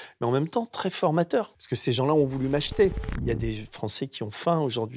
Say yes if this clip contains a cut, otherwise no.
yes